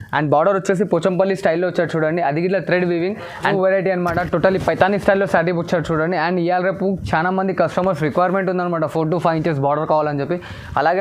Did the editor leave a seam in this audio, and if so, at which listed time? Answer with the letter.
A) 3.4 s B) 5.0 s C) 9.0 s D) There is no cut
A